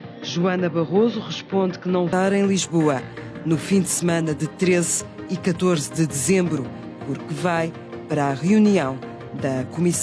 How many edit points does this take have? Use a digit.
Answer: 1